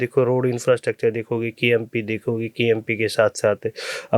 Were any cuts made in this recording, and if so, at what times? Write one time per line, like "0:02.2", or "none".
none

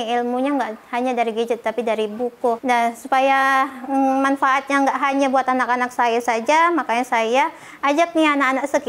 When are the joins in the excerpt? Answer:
0:02.6

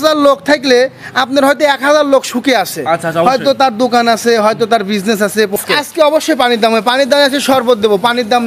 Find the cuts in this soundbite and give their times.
0:05.5

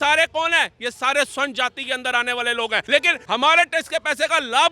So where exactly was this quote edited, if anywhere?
0:03.0

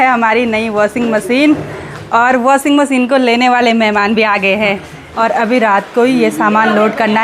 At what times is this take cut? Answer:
0:05.0

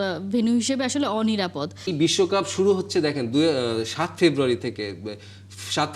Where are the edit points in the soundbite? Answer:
0:01.9

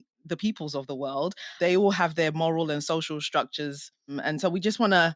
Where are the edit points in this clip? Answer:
0:01.5
0:04.2

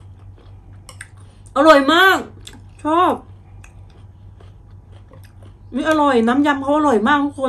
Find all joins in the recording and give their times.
none

